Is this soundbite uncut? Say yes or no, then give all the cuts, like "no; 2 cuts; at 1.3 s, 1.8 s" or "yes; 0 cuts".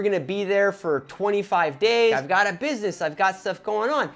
no; 1 cut; at 2.2 s